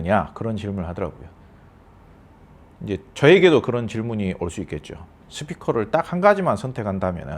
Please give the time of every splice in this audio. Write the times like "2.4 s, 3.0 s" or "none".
none